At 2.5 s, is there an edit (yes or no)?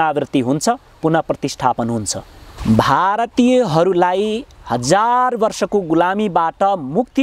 yes